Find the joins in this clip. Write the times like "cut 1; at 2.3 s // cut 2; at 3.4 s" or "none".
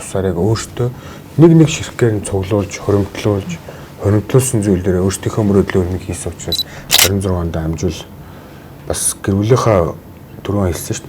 cut 1; at 6.9 s